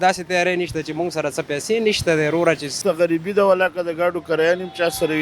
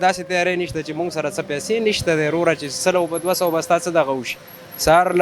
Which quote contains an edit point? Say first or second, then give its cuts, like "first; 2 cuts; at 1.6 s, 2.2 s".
first; 1 cut; at 2.8 s